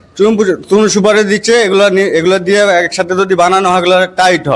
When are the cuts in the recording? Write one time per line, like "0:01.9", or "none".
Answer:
none